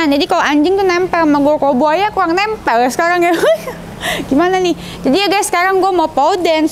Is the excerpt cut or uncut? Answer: uncut